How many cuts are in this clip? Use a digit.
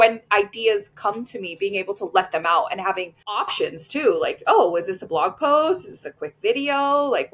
0